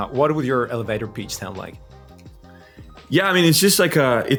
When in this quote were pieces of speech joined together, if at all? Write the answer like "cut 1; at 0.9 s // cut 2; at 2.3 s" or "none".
none